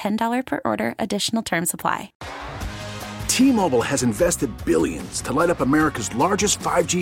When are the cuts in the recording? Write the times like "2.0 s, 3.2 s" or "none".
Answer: 2.2 s

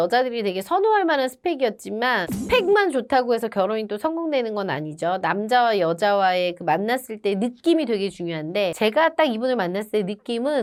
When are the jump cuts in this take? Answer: none

